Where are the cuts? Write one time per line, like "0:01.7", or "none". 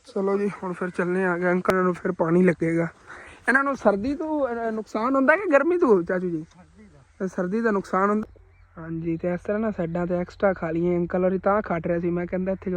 0:01.7
0:08.2